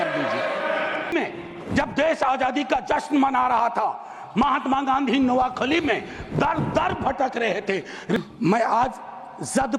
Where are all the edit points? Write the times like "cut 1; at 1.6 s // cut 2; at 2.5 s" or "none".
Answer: cut 1; at 1.1 s // cut 2; at 8.2 s